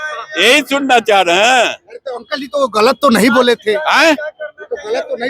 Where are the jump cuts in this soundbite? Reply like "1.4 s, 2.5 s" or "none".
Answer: none